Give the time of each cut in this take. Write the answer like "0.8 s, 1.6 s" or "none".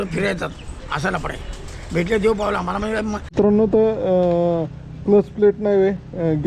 3.4 s